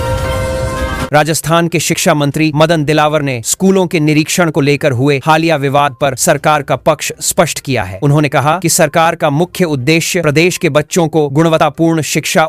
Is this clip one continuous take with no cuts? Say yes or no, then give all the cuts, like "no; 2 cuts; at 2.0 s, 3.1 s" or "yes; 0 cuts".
no; 1 cut; at 1.0 s